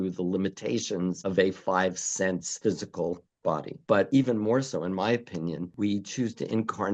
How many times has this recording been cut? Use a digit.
1